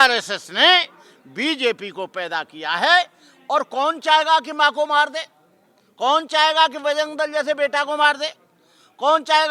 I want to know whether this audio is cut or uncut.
uncut